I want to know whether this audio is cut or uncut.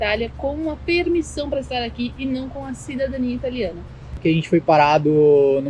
cut